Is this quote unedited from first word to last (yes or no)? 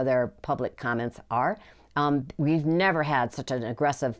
yes